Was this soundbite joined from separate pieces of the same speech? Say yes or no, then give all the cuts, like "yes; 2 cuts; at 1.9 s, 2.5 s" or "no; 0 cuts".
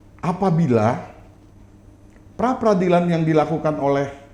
no; 0 cuts